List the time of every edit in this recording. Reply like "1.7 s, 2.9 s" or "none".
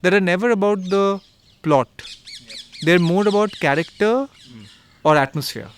none

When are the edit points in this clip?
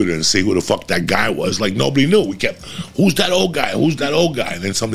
none

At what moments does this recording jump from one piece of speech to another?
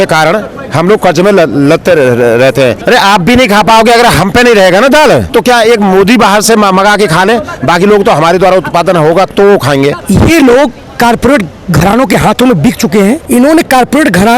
2.8 s, 5.3 s, 10.0 s, 13.2 s

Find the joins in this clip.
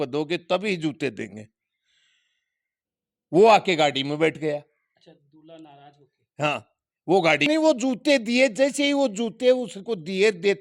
7.5 s

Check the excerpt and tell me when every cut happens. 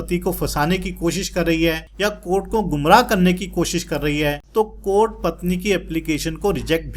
1.9 s, 4.4 s

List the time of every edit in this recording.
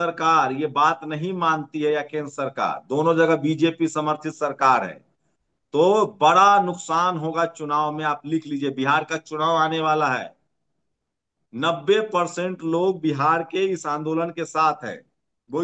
none

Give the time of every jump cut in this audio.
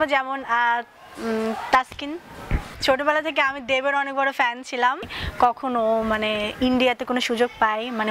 2.7 s, 5.1 s

